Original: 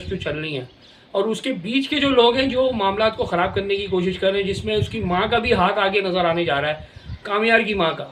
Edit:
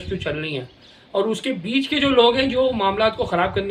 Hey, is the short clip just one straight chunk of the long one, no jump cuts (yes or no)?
yes